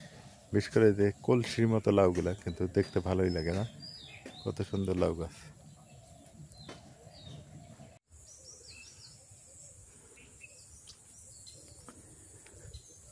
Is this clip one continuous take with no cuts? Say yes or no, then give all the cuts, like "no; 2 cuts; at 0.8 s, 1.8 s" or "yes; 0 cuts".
no; 1 cut; at 8.2 s